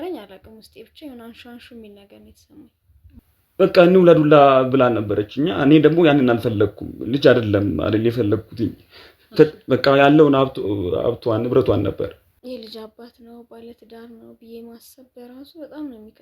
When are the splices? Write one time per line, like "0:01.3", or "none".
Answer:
0:03.2
0:12.3